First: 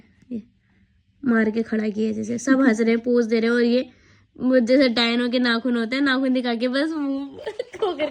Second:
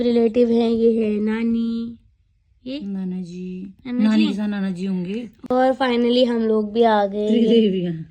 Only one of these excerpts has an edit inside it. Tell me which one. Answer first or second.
second